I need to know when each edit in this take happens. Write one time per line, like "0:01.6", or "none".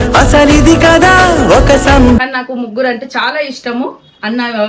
0:02.2